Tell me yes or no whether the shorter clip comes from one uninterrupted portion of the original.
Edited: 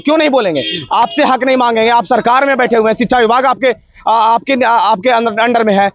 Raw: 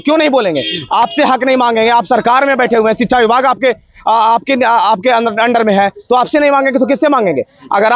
yes